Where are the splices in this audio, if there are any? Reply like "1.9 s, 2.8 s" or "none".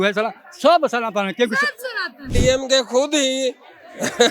2.3 s